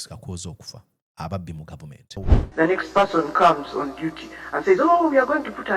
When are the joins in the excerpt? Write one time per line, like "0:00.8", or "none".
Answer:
0:02.3